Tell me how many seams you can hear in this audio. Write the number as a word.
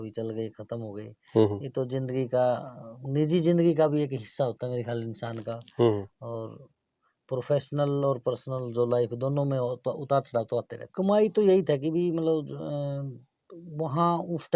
one